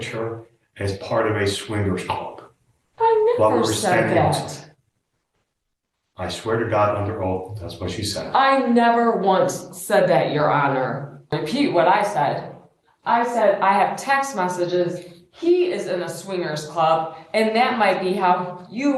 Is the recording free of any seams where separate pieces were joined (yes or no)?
no